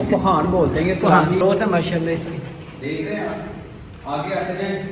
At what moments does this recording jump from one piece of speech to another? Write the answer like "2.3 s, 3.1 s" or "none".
1.4 s